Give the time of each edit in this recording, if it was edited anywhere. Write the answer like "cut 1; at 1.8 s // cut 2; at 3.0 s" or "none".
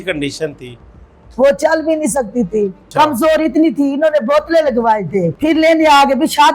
cut 1; at 2.8 s // cut 2; at 5.3 s